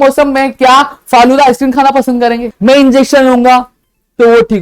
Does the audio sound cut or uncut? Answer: cut